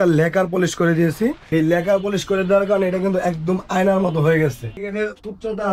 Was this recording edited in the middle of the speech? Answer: yes; 2 cuts; at 1.5 s, 4.8 s

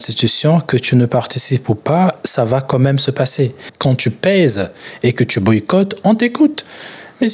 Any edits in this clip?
yes; 1 cut; at 3.6 s

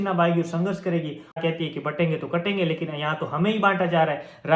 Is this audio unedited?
no; 1 cut; at 1.4 s

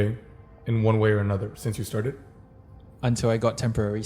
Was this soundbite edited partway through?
no; 0 cuts

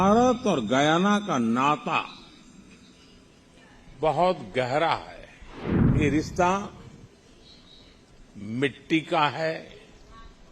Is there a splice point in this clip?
yes; 1 cut; at 5.9 s

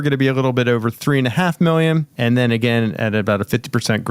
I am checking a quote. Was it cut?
yes; 1 cut; at 2.1 s

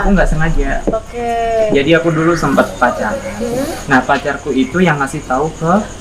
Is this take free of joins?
no; 1 cut; at 3.8 s

